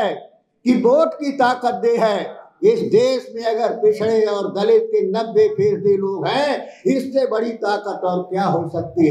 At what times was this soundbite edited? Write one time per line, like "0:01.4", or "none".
none